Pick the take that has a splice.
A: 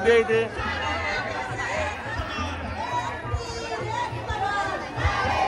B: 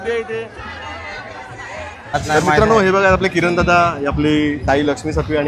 B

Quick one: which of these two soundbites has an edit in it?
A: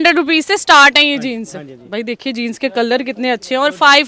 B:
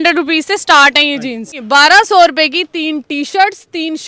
B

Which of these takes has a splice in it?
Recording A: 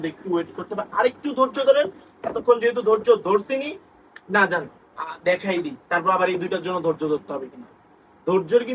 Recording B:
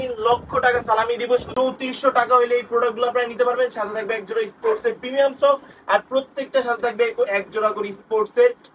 B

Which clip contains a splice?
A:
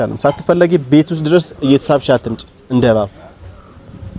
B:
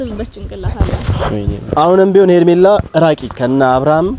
B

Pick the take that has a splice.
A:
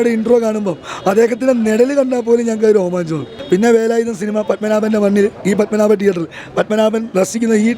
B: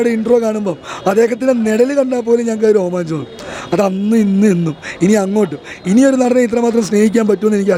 A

